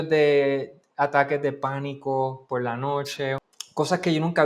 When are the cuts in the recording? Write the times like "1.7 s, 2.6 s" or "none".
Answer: 3.4 s